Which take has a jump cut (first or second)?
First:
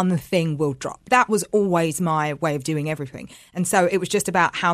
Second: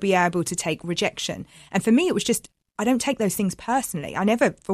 first